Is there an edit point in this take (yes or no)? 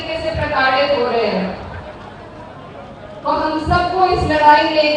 no